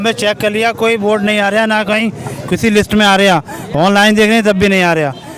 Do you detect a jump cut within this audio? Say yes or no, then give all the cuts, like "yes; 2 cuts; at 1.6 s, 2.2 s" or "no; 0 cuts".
no; 0 cuts